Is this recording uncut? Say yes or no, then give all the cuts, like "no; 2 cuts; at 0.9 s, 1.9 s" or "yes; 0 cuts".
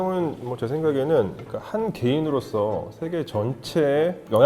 yes; 0 cuts